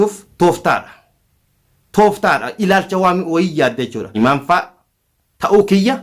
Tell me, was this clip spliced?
no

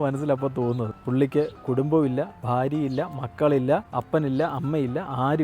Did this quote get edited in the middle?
yes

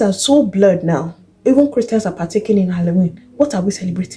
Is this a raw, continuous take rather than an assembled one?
yes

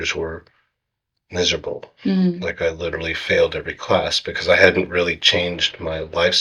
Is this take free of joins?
yes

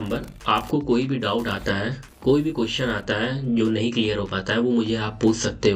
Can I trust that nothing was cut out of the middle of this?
yes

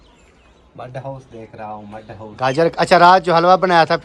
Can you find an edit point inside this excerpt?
yes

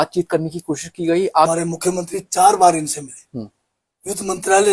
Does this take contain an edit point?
yes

